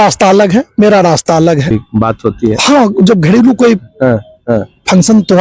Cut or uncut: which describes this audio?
cut